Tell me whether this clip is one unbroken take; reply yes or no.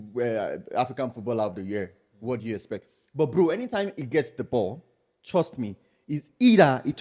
yes